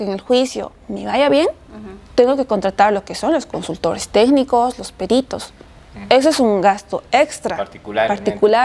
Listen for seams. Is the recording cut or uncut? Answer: uncut